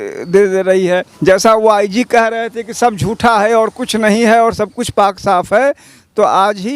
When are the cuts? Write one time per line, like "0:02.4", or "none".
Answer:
0:01.1